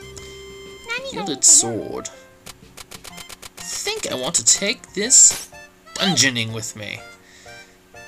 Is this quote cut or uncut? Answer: cut